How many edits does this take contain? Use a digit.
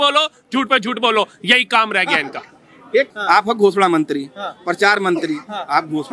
1